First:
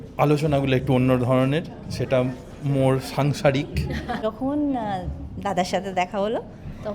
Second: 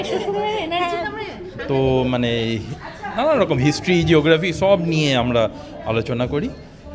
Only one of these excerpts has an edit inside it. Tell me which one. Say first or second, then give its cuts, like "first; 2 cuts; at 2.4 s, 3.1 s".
first; 1 cut; at 4.2 s